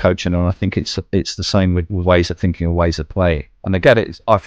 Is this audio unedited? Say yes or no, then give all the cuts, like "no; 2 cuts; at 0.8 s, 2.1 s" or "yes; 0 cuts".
no; 2 cuts; at 1.9 s, 3.5 s